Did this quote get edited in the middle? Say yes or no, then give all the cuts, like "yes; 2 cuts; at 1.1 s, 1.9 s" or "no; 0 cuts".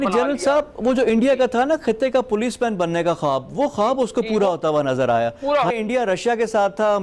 yes; 1 cut; at 5.7 s